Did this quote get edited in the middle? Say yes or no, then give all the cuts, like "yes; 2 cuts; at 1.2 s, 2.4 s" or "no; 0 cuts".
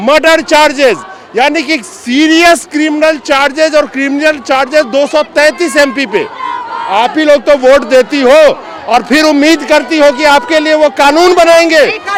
no; 0 cuts